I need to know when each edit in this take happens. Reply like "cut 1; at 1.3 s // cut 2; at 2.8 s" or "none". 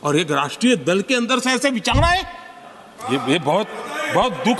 none